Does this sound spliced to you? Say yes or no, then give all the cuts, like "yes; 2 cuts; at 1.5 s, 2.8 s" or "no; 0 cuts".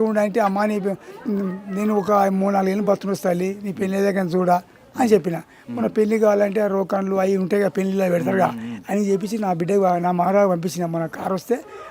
no; 0 cuts